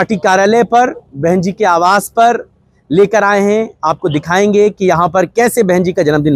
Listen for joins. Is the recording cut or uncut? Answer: uncut